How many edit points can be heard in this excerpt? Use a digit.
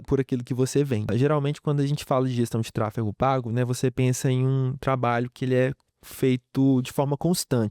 1